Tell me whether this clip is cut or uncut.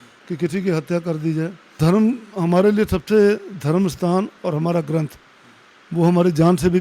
cut